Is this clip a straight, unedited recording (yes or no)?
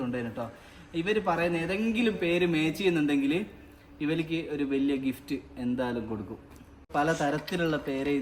no